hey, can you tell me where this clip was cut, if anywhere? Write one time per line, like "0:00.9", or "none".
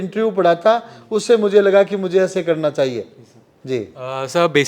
none